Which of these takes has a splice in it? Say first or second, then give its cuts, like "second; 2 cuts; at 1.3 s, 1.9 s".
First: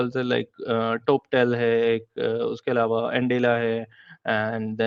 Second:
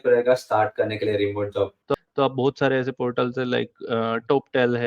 second; 1 cut; at 1.9 s